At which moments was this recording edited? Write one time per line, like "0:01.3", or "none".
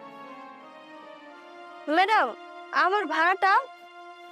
0:01.9